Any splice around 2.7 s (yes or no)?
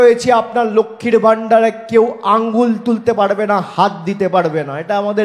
no